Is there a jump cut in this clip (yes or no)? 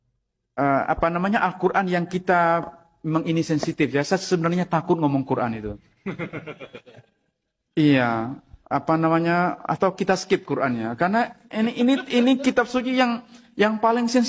no